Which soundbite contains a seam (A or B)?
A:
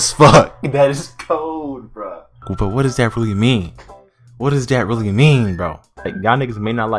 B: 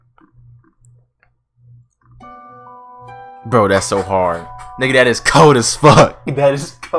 A